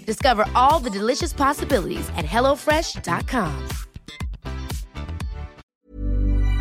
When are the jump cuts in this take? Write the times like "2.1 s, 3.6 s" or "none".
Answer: 5.6 s